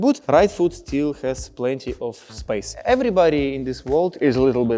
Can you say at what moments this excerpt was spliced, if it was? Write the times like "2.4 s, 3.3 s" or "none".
2.8 s